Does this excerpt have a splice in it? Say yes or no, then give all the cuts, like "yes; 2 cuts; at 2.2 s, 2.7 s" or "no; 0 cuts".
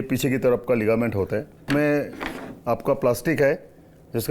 yes; 1 cut; at 1.7 s